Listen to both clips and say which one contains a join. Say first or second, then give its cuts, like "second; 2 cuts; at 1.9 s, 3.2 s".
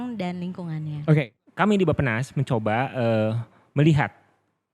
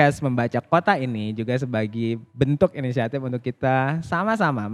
first; 1 cut; at 1.3 s